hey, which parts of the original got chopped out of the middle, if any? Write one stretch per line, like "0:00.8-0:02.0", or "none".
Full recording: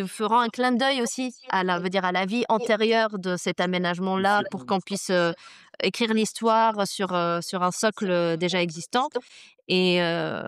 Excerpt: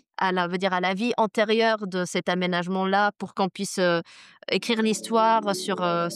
none